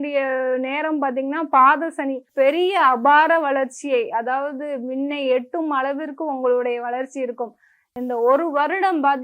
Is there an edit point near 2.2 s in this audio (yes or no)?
yes